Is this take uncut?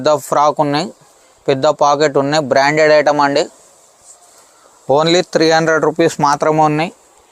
yes; 0 cuts

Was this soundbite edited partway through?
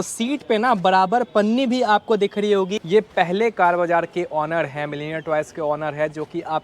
yes; 1 cut; at 2.8 s

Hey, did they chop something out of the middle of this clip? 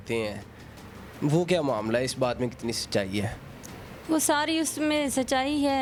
no; 0 cuts

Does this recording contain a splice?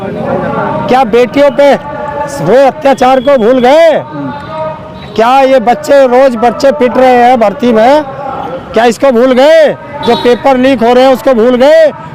no; 0 cuts

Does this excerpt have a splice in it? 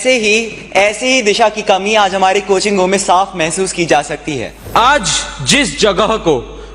yes; 1 cut; at 4.5 s

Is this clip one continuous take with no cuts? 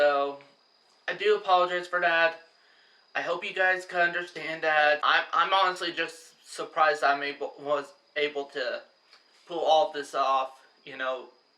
no; 1 cut; at 5.0 s

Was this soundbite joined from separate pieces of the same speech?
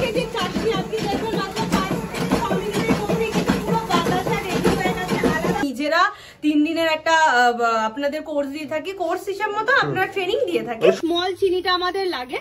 yes; 2 cuts; at 5.6 s, 11.0 s

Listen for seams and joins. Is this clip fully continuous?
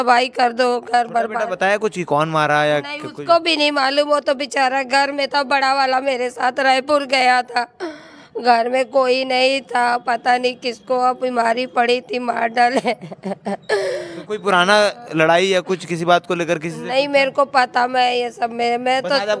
yes; 0 cuts

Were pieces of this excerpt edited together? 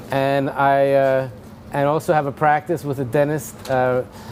no; 0 cuts

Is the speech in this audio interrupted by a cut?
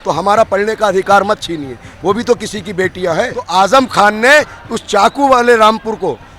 yes; 1 cut; at 3.5 s

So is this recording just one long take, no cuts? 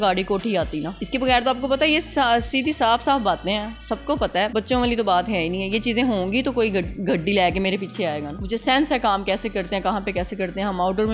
no; 3 cuts; at 1.0 s, 4.5 s, 8.3 s

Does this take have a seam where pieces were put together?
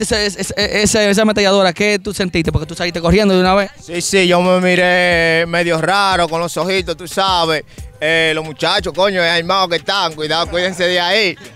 no; 0 cuts

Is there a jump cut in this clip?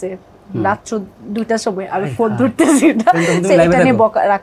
no; 0 cuts

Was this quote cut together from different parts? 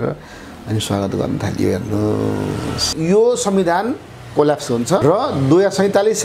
yes; 2 cuts; at 2.9 s, 5.0 s

